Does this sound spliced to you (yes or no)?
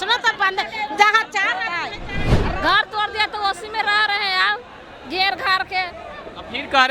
yes